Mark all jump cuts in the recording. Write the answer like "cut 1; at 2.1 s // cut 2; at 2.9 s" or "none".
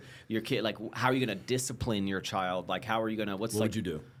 none